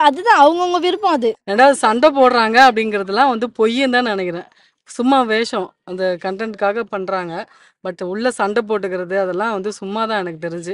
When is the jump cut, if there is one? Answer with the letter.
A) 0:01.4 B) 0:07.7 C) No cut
A